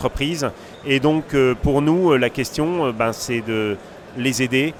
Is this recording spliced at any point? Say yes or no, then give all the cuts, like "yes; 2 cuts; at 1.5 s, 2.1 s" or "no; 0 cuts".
no; 0 cuts